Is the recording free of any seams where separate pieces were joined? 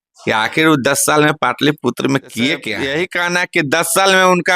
no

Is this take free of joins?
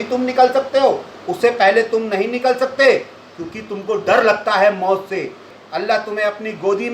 no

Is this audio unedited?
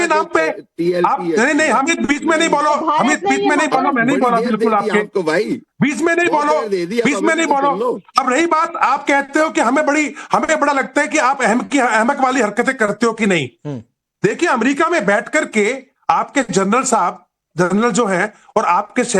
no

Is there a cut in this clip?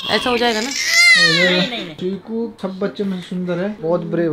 no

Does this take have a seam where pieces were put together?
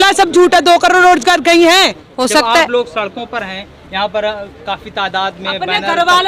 yes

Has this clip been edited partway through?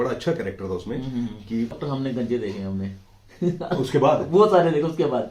yes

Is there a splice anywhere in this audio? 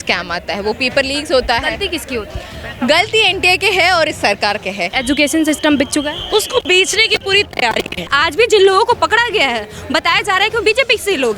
yes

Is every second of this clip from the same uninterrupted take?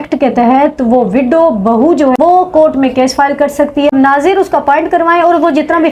no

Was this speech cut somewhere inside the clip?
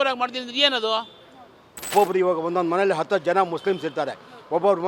yes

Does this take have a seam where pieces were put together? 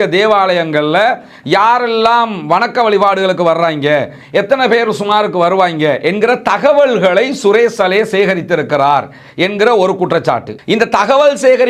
no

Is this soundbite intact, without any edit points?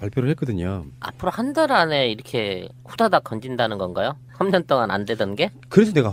yes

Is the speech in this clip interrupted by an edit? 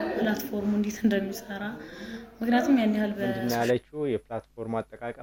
no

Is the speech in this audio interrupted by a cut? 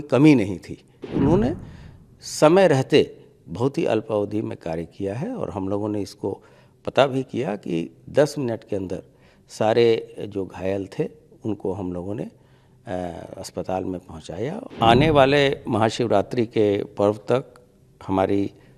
yes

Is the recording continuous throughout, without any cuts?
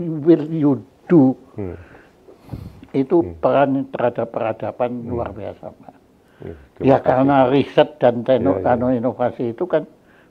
yes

